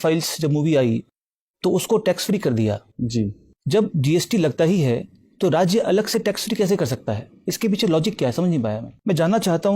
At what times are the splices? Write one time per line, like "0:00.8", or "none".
0:08.9